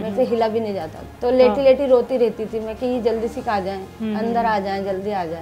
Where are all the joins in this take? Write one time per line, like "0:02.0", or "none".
0:01.0